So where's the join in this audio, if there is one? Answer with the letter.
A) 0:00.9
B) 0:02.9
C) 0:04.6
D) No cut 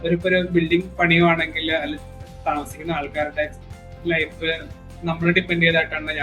A